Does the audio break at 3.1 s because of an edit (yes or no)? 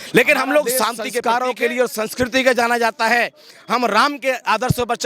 no